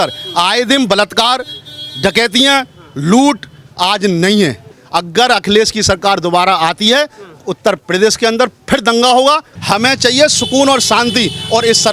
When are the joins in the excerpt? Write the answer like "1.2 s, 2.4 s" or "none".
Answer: 4.7 s, 9.5 s